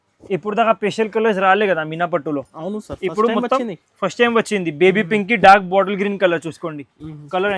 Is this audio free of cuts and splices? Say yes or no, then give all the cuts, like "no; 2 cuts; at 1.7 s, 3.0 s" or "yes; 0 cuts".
yes; 0 cuts